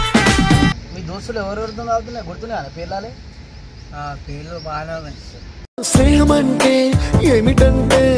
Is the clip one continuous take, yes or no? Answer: no